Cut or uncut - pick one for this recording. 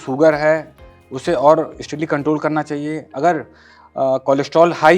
uncut